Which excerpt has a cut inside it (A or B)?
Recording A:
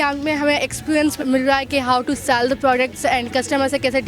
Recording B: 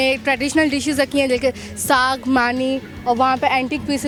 A